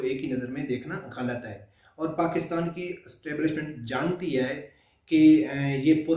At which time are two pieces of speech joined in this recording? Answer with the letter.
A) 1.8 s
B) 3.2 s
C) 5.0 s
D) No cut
D